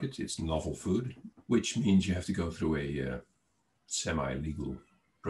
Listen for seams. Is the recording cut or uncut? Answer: cut